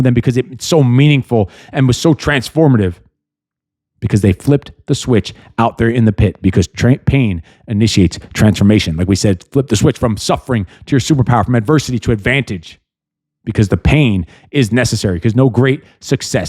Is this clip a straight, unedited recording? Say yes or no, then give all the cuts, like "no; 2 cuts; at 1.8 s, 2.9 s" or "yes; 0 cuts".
yes; 0 cuts